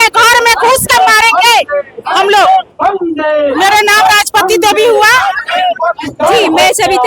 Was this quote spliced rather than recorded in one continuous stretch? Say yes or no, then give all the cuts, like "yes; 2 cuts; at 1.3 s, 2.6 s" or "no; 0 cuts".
no; 0 cuts